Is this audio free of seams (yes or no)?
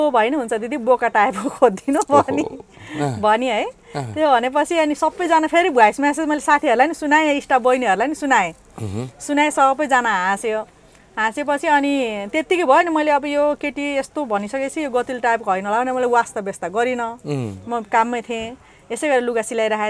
yes